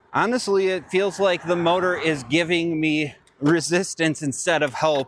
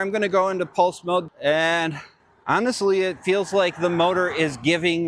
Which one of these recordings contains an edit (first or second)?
second